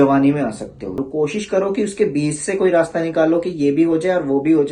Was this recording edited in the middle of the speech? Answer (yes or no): yes